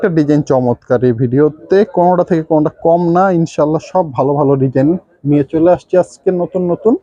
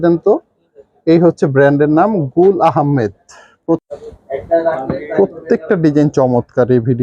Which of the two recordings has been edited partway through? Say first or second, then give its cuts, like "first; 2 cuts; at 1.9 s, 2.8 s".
second; 1 cut; at 3.9 s